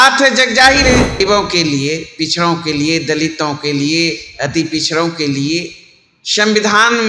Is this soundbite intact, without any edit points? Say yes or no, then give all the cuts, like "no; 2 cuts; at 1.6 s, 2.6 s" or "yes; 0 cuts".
no; 1 cut; at 1.2 s